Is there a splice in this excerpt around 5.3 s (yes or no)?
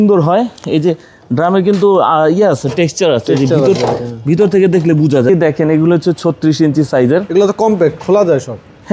yes